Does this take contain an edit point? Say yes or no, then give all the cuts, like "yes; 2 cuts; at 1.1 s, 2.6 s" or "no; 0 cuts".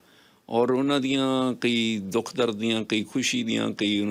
no; 0 cuts